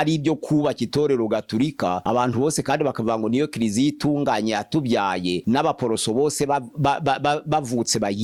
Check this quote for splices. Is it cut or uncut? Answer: uncut